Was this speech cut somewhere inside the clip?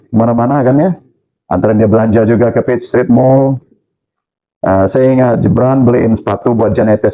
no; 0 cuts

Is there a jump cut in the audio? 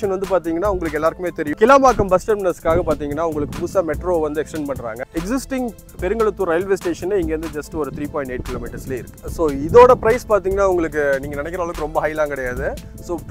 yes; 2 cuts; at 4.9 s, 9.2 s

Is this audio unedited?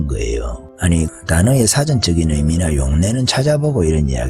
no; 1 cut; at 1.1 s

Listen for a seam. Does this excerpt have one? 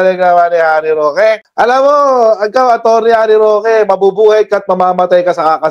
no; 0 cuts

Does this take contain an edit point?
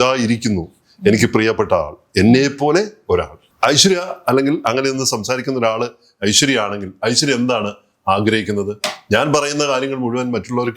yes; 1 cut; at 3.4 s

